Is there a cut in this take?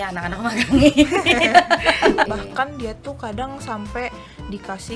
yes; 1 cut; at 2.3 s

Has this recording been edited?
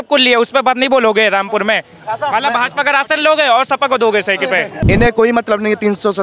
yes; 1 cut; at 4.8 s

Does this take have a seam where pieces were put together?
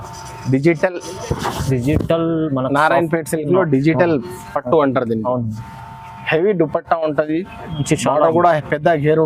no; 0 cuts

